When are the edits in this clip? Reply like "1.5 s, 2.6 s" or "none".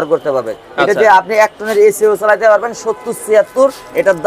none